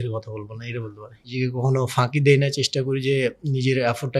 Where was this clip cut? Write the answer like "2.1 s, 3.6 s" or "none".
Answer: 1.3 s

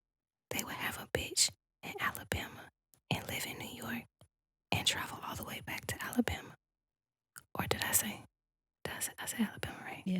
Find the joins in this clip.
none

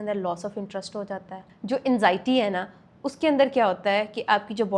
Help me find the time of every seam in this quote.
1.4 s

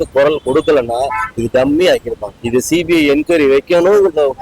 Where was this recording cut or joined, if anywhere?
2.4 s

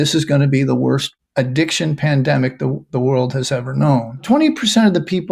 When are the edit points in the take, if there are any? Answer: 1.2 s, 4.2 s

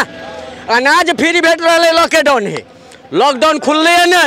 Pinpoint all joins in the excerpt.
none

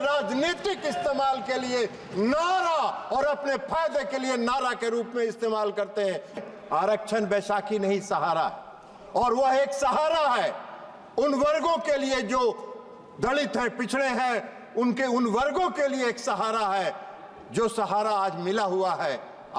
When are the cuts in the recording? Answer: 6.4 s

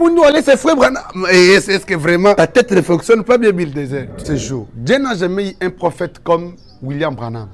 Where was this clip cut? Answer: 4.2 s

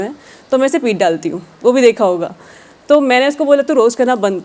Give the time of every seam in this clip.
none

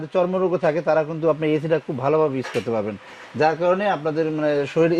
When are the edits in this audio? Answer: none

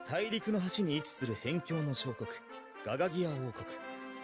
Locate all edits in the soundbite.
none

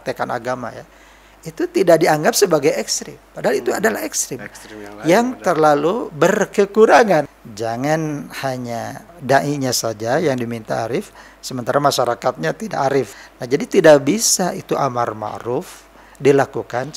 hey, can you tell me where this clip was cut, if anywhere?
7.3 s, 9.0 s, 13.1 s

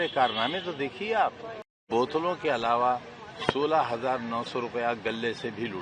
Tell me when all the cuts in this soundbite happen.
1.8 s

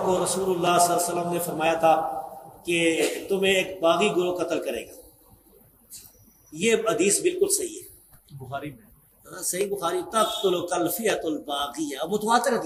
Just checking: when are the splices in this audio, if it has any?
none

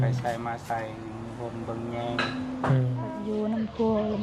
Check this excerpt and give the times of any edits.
3.2 s

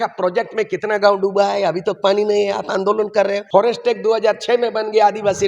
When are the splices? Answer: 3.4 s

